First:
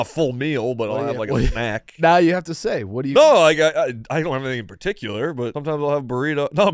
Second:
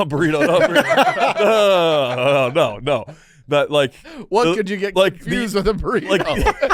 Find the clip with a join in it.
first; 2 cuts; at 1.9 s, 5.6 s

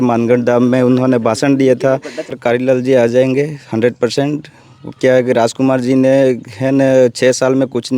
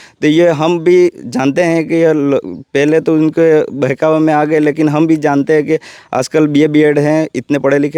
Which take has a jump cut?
first; 1 cut; at 2.4 s

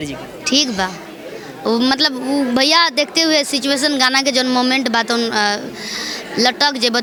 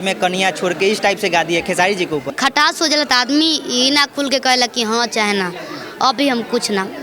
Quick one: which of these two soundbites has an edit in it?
second; 1 cut; at 2.3 s

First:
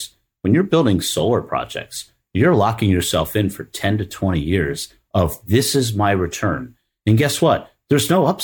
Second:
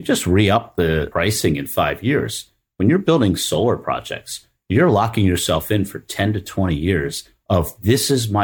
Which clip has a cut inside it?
second; 1 cut; at 1.1 s

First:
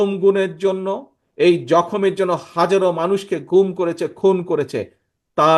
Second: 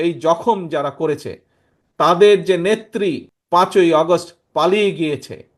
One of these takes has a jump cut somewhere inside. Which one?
second; 1 cut; at 3.3 s

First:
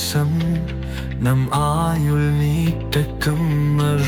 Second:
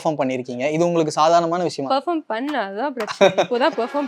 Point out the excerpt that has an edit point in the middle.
second; 1 cut; at 1.9 s

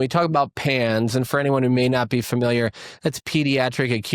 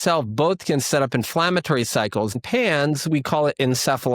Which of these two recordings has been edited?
second; 1 cut; at 2.3 s

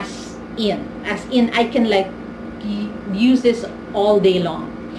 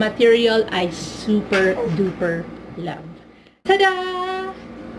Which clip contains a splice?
second; 1 cut; at 3.5 s

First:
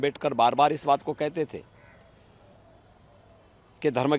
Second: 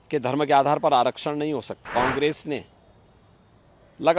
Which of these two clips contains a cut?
second; 1 cut; at 1.8 s

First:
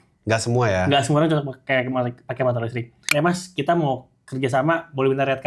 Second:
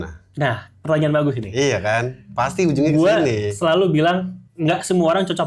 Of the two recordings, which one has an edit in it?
first; 1 cut; at 3.1 s

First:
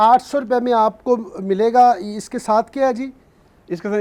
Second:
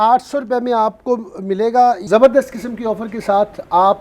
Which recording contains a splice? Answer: second; 1 cut; at 2.0 s

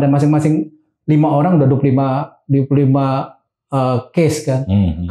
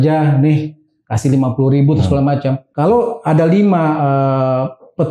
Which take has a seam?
second; 1 cut; at 2.7 s

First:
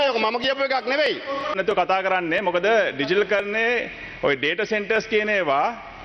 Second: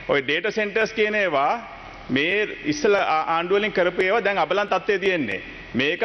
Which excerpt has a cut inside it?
first; 1 cut; at 1.6 s

